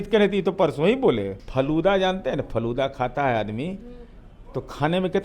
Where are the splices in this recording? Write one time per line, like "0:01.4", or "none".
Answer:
0:01.4